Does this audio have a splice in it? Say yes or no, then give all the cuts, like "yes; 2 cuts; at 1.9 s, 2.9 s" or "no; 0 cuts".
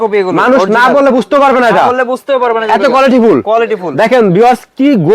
no; 0 cuts